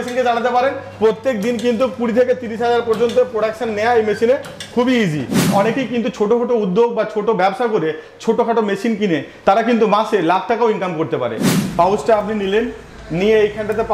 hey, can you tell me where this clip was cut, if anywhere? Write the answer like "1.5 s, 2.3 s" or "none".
5.5 s, 11.5 s